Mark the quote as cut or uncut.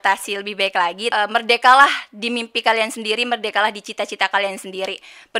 cut